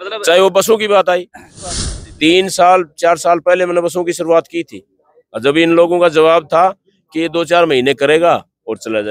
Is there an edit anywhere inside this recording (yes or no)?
yes